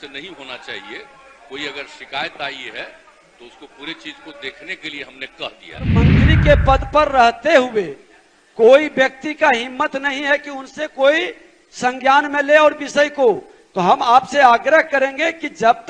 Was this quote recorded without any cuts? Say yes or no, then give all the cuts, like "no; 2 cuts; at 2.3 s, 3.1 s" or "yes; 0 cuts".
no; 1 cut; at 6.1 s